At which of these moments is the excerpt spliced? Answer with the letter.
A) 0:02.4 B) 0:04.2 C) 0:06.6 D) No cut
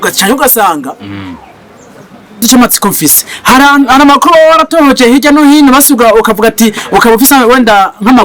A